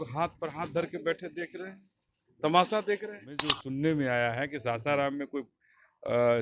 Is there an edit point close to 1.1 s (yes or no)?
no